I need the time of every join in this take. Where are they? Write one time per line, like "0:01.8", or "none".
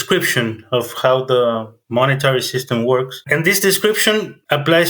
0:03.2